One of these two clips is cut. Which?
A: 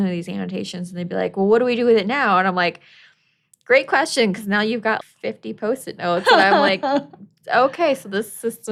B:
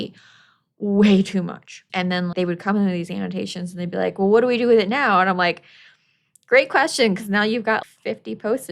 B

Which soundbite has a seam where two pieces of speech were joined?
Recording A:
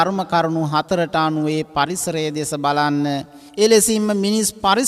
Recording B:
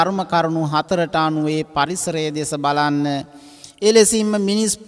A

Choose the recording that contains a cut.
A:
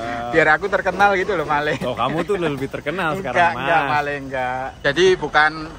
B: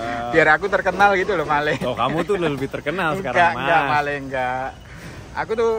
A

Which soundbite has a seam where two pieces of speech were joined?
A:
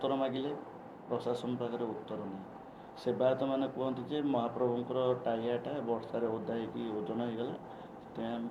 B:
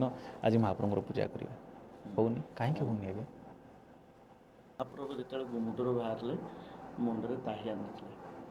B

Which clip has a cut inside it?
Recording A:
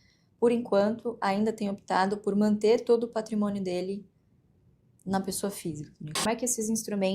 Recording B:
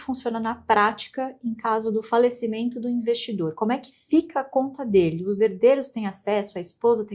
A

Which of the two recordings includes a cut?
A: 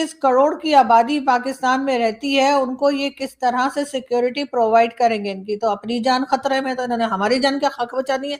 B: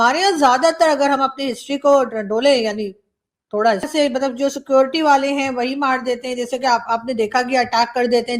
B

